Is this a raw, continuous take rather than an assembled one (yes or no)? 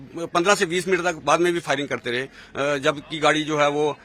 yes